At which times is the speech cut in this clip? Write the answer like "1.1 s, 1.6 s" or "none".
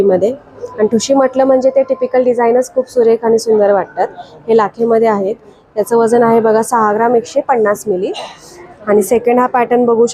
none